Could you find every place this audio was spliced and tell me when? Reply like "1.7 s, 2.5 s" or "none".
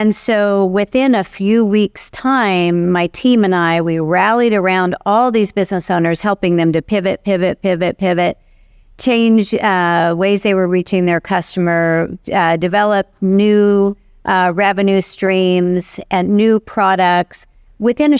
none